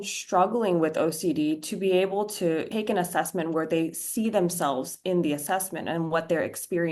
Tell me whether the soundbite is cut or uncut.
cut